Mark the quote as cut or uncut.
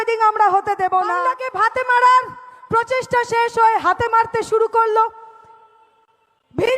cut